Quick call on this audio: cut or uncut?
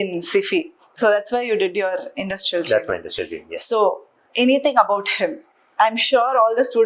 uncut